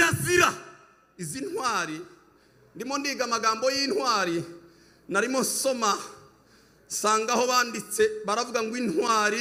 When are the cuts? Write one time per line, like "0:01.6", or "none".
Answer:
none